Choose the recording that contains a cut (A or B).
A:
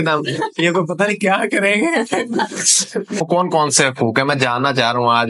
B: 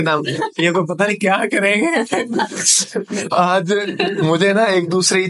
A